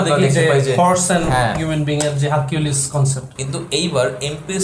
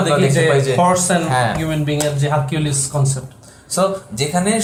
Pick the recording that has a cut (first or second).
first